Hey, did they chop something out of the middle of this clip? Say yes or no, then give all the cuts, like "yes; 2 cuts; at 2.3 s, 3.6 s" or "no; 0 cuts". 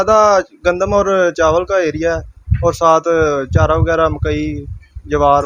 no; 0 cuts